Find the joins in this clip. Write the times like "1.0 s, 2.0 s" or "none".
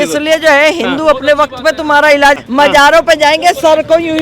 2.4 s